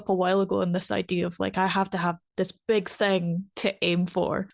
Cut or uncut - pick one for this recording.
cut